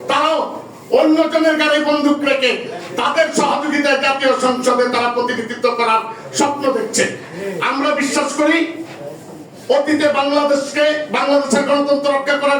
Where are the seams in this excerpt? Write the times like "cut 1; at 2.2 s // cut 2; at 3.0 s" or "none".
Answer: none